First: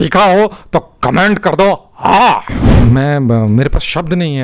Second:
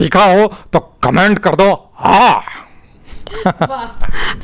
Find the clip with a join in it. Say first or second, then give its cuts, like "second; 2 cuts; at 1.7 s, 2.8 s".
first; 1 cut; at 2.7 s